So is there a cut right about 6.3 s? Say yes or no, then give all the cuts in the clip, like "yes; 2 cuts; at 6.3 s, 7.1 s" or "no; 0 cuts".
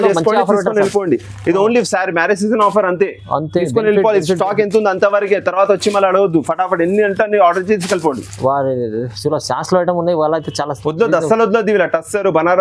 no; 0 cuts